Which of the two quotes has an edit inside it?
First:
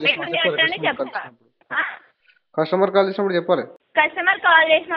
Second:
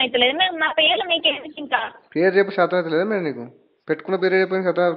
first; 1 cut; at 3.8 s

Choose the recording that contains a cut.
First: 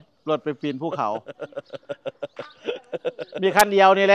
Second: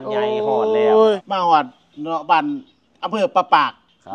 second; 1 cut; at 1.2 s

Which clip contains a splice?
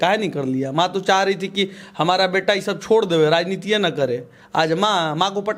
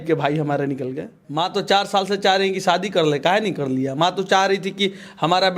second; 1 cut; at 1.2 s

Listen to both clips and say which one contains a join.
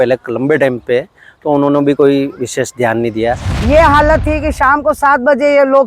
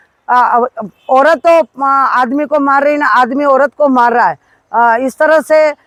first; 1 cut; at 3.5 s

